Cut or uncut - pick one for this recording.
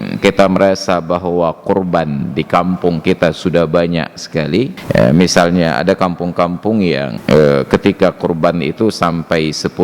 cut